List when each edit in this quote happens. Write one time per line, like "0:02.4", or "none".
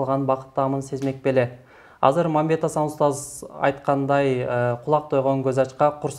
none